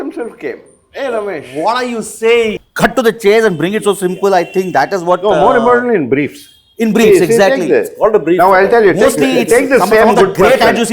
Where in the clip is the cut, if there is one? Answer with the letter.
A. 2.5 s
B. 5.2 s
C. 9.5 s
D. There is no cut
A